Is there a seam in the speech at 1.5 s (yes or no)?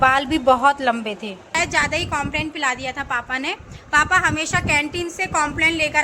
yes